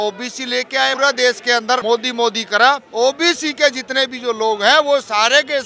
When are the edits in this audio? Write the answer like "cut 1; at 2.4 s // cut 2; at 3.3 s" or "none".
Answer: cut 1; at 1.0 s // cut 2; at 1.8 s // cut 3; at 2.9 s